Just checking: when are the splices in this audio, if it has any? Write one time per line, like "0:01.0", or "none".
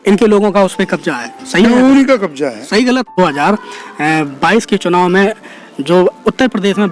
0:03.1